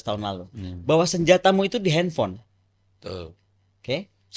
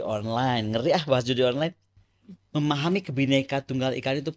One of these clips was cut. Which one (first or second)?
second